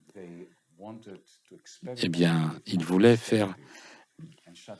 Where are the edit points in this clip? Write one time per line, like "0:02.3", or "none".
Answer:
none